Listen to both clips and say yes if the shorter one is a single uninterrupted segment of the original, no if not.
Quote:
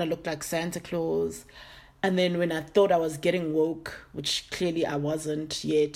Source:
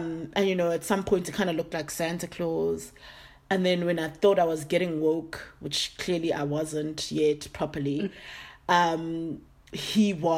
yes